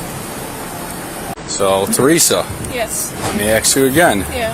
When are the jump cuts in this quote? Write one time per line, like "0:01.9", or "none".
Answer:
0:01.4